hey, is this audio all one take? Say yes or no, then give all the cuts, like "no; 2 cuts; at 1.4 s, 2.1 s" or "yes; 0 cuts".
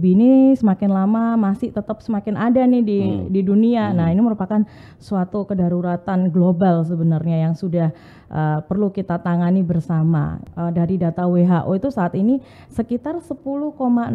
no; 1 cut; at 10.4 s